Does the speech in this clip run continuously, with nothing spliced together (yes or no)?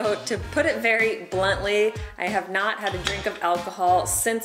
yes